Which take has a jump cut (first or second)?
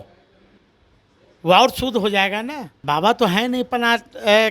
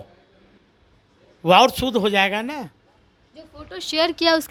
first